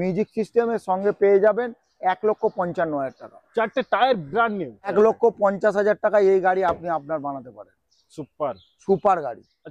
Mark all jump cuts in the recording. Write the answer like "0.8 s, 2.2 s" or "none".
4.9 s